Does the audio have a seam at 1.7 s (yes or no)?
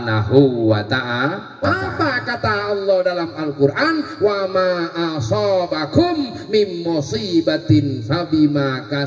yes